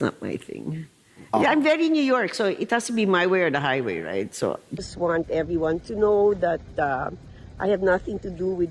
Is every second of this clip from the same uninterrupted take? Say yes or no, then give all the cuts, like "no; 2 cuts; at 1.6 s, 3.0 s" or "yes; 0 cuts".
no; 1 cut; at 4.8 s